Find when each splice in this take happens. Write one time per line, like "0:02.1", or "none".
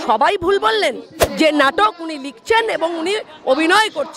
0:01.2